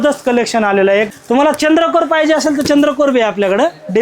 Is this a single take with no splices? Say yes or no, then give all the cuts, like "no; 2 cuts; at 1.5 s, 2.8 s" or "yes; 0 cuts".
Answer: no; 1 cut; at 1.1 s